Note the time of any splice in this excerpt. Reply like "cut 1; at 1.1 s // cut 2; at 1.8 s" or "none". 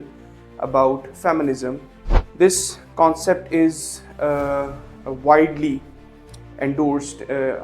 cut 1; at 1.9 s